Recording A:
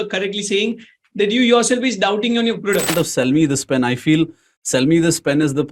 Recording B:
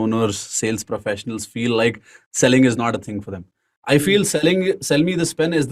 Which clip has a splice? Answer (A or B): A